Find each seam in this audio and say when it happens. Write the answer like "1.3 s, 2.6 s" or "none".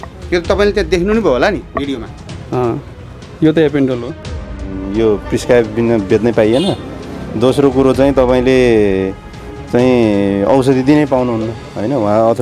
4.6 s